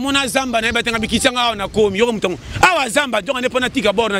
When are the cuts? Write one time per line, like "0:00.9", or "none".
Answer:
none